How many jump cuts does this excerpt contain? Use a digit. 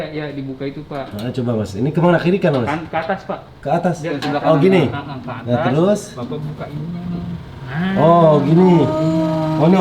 0